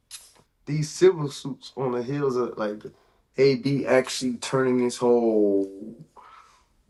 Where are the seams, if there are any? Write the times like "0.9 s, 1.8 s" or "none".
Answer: none